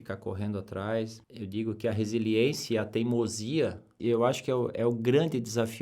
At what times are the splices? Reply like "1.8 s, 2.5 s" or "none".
1.2 s, 3.9 s